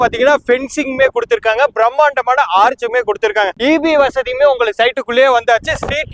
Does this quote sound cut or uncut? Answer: uncut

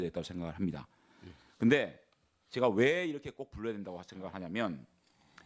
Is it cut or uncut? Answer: uncut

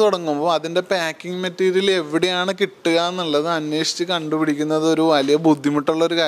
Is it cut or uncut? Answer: uncut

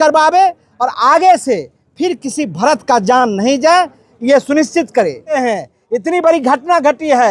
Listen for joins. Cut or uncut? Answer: cut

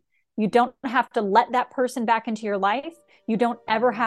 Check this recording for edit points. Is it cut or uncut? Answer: uncut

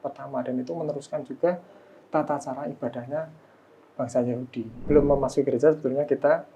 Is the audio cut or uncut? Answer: cut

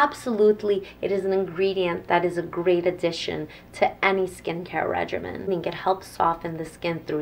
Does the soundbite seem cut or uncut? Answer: cut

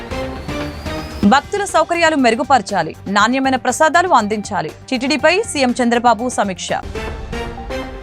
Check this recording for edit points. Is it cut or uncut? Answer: cut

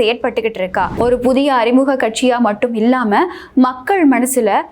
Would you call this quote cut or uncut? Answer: cut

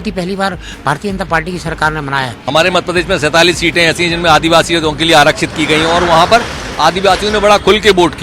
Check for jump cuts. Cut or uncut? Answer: cut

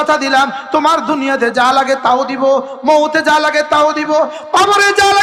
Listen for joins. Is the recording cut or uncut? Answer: uncut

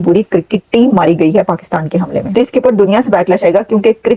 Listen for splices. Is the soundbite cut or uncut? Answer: uncut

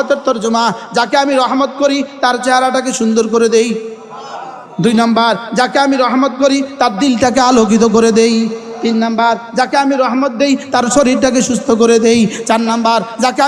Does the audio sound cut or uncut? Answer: uncut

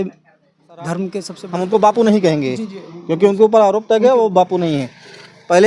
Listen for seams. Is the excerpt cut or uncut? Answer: cut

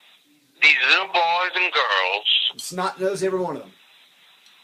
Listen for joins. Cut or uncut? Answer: uncut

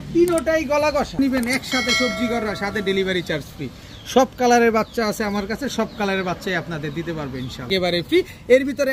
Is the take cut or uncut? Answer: cut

